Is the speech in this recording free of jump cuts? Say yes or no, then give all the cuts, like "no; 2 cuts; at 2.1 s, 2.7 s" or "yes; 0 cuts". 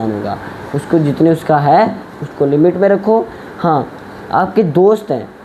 yes; 0 cuts